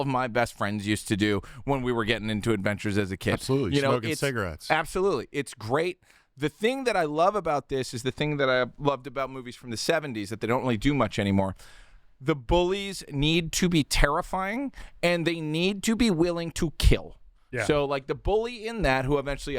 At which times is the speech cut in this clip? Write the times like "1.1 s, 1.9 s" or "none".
none